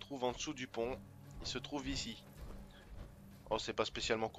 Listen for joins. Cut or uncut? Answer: uncut